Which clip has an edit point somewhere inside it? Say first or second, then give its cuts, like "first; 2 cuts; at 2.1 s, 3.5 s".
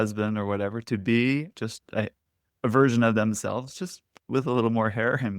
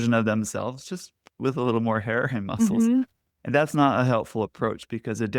first; 1 cut; at 1.5 s